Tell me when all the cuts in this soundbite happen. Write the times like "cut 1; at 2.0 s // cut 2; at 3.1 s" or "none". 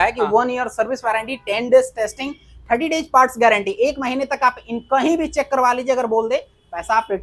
none